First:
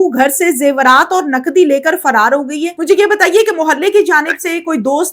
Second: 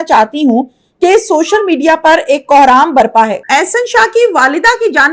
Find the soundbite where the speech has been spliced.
first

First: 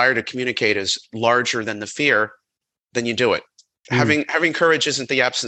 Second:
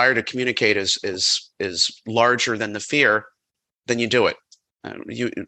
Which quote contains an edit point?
first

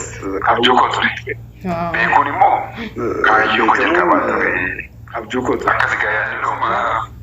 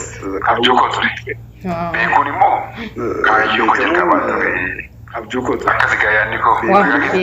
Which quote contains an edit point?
first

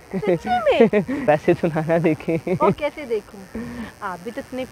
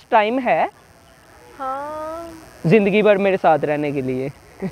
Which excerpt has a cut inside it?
first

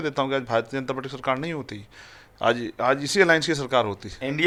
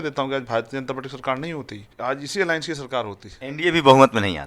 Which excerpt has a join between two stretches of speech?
second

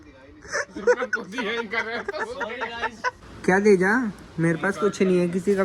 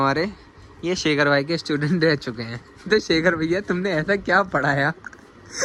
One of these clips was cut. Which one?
first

